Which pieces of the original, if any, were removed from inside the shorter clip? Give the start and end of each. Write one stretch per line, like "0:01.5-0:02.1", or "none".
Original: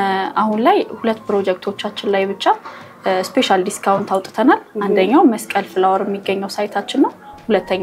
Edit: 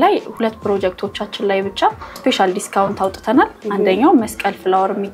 0:02.8-0:03.3